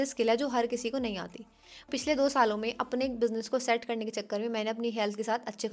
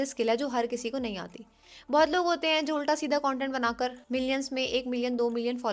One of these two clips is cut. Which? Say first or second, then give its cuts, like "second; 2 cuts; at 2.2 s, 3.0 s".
first; 1 cut; at 1.8 s